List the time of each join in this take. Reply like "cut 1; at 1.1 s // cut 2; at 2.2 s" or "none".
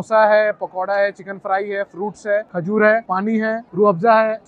none